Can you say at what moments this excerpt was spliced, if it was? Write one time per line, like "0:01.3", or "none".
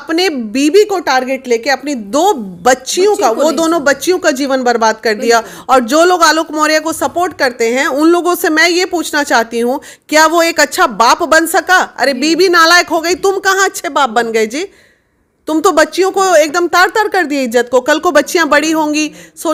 none